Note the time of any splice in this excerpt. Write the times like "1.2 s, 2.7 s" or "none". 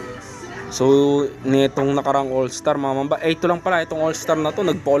none